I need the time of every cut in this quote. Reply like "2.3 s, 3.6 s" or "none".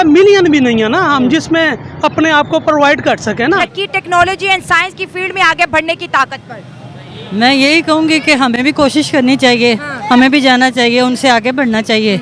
3.7 s